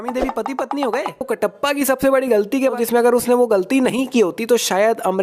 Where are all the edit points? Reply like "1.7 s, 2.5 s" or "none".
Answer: 1.3 s, 2.8 s